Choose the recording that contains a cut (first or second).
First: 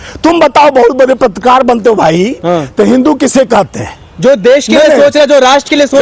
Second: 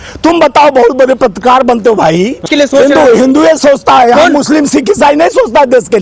second